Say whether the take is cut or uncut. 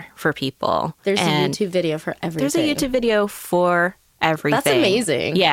uncut